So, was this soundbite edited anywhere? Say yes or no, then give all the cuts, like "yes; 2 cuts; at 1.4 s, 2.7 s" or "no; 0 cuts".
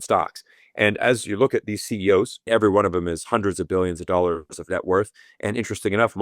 yes; 1 cut; at 2.4 s